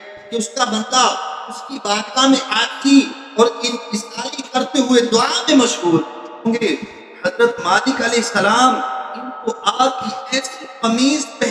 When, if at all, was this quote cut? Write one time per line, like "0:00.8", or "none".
0:06.4